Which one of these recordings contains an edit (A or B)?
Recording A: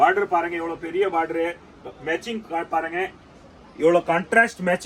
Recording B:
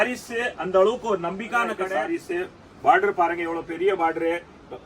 B